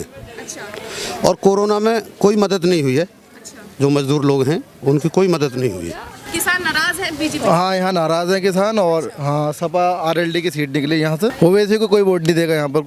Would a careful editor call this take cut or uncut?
cut